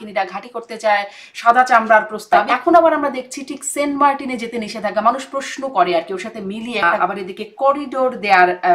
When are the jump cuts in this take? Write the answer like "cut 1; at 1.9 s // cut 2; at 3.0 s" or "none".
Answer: cut 1; at 2.4 s // cut 2; at 6.8 s